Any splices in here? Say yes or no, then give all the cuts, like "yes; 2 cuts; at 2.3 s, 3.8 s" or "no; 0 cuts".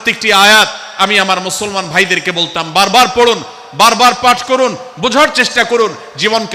no; 0 cuts